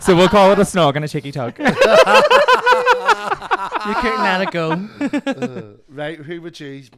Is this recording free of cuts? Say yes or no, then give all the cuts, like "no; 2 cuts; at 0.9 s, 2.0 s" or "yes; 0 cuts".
yes; 0 cuts